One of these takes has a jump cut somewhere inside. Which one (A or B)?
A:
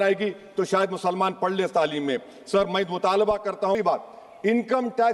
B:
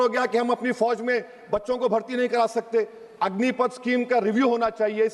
A